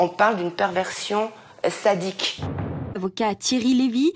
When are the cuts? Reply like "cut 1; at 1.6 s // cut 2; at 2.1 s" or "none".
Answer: cut 1; at 2.8 s